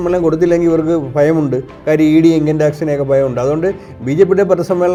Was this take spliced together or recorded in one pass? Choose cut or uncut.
uncut